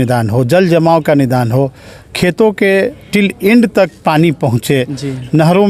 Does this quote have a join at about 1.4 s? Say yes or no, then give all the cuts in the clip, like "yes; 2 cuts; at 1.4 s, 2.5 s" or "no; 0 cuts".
no; 0 cuts